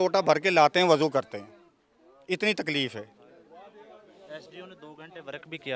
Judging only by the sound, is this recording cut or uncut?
uncut